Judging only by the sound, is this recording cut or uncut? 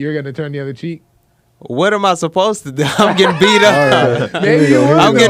uncut